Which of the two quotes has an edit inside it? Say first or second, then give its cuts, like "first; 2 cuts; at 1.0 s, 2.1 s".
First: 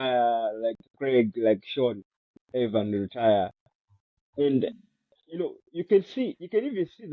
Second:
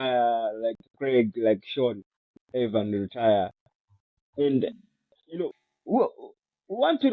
second; 1 cut; at 5.6 s